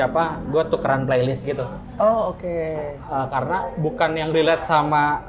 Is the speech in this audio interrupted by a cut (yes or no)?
no